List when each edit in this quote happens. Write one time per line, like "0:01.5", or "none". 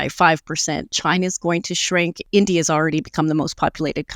0:02.2

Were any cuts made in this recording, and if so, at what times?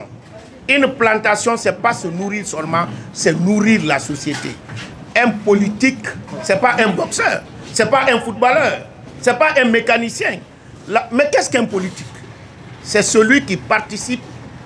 none

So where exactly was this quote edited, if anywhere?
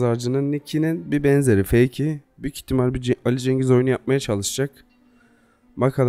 none

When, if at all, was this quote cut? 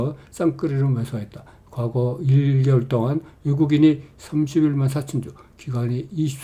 none

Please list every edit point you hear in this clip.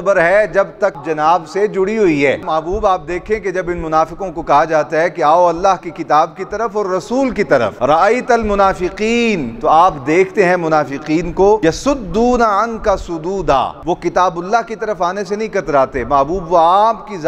0:01.0
0:02.4
0:11.6

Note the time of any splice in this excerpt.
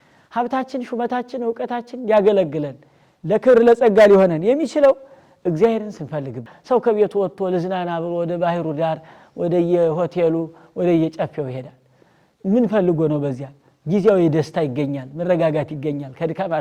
0:06.5

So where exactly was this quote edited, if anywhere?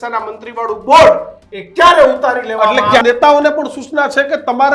0:03.0

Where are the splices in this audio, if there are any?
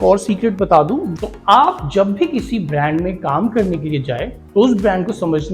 0:01.1

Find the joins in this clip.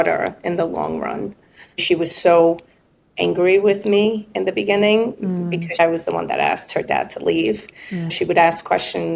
0:01.8
0:05.8
0:08.2

